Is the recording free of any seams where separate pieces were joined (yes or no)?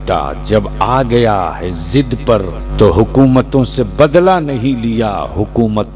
no